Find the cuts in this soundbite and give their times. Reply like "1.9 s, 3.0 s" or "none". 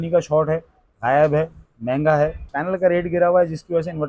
2.6 s